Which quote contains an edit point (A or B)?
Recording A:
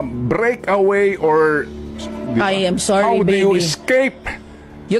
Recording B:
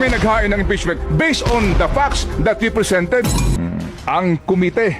B